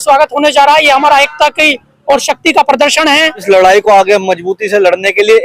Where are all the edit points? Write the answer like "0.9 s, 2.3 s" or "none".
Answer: 3.4 s